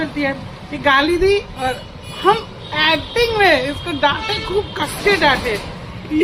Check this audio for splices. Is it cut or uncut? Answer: uncut